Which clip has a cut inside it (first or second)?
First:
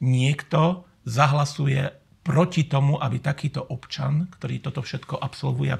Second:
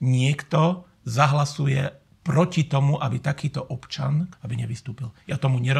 second